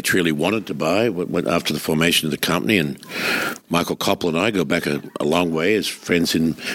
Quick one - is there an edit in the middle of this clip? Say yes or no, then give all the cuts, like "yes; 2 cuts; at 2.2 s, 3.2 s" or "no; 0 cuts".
no; 0 cuts